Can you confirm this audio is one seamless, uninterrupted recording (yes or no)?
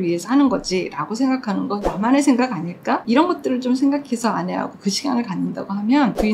no